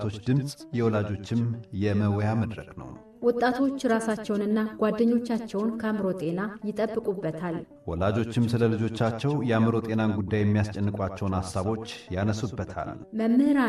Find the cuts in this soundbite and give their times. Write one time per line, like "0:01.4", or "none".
none